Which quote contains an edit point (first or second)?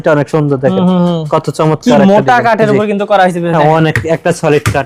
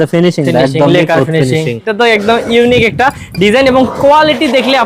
second